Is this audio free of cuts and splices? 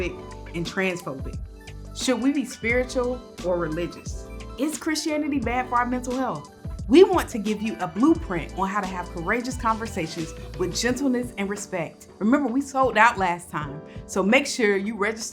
yes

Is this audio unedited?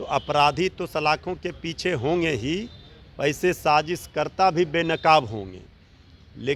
yes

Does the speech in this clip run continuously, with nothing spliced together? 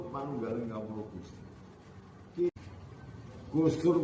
no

